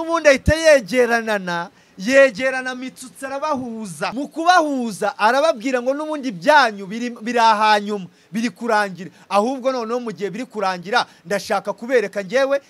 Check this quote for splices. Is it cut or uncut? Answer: cut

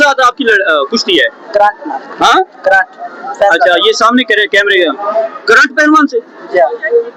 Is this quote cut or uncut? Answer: uncut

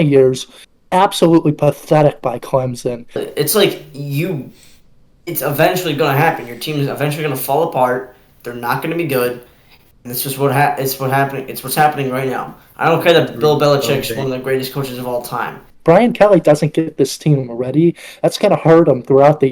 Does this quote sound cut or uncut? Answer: cut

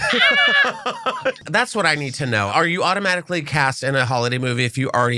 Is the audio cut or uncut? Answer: cut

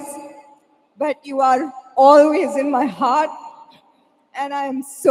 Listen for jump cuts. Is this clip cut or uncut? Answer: uncut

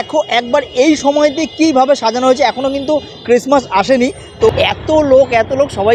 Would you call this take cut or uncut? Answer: cut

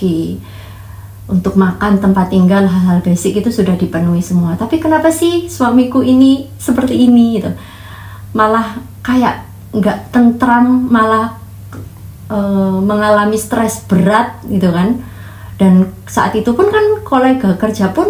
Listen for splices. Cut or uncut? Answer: uncut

